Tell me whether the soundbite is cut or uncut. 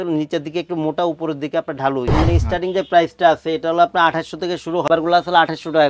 cut